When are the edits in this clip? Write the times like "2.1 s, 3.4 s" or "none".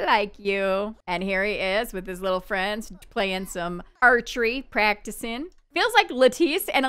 0.9 s, 5.6 s